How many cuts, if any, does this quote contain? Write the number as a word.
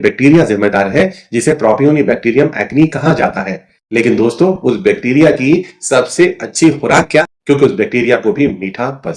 one